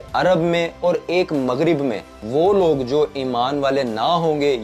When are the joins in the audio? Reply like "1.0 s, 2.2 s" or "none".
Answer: 2.2 s